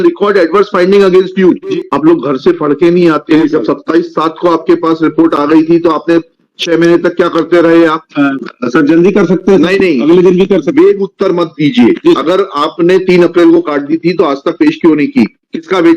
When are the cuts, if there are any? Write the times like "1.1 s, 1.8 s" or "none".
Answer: 1.7 s, 3.4 s, 8.0 s